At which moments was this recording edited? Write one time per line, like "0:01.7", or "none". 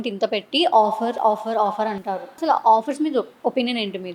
0:02.4